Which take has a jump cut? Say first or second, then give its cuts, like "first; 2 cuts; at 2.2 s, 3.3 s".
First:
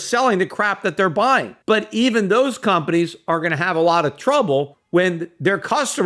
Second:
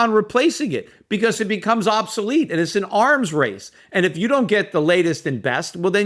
first; 2 cuts; at 1.5 s, 4.8 s